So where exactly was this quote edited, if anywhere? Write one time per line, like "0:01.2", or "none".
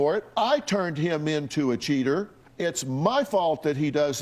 0:02.4

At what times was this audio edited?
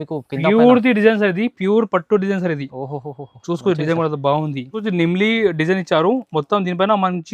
0:04.8

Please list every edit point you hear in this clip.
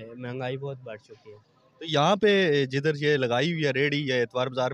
none

